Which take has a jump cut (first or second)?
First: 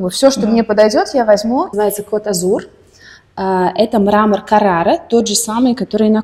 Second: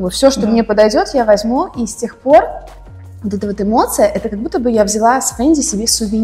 first